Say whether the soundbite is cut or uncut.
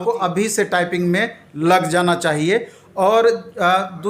uncut